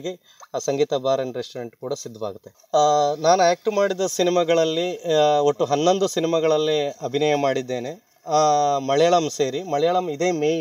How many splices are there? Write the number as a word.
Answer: one